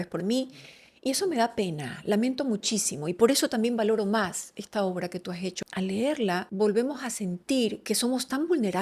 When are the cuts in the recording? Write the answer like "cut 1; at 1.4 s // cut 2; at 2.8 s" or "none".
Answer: cut 1; at 5.6 s // cut 2; at 6.5 s // cut 3; at 7.8 s